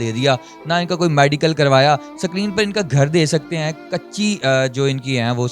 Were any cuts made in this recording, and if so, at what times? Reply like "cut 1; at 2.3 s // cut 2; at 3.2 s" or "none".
none